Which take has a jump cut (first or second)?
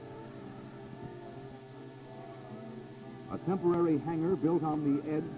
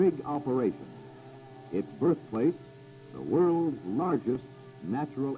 second